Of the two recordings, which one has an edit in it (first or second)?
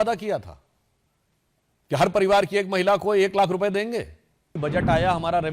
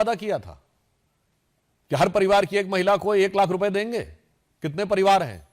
first